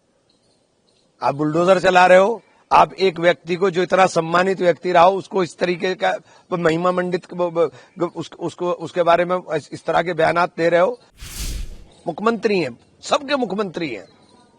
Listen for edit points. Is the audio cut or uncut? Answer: cut